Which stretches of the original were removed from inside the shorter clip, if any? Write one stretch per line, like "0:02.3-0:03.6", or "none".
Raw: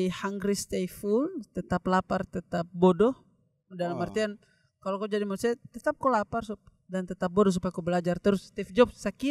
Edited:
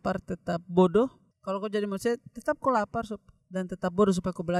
0:03.3-0:04.7